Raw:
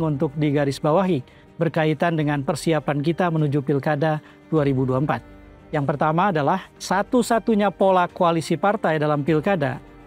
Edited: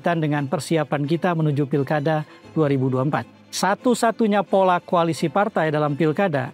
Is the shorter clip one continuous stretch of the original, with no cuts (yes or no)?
no